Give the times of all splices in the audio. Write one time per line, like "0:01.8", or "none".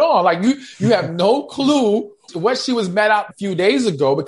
0:02.2
0:03.3